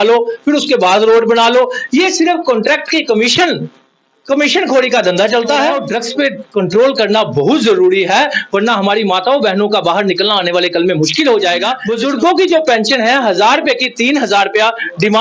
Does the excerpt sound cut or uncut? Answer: cut